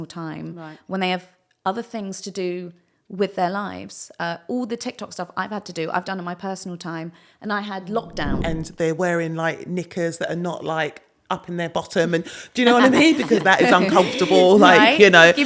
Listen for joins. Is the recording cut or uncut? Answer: cut